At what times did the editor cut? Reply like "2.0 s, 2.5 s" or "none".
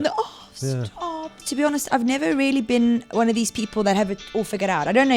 1.4 s